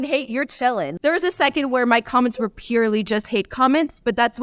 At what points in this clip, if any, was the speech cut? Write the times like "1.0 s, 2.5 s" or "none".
0.9 s